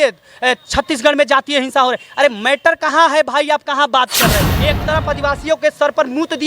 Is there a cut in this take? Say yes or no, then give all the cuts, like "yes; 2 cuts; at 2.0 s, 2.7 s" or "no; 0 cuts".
yes; 1 cut; at 4.5 s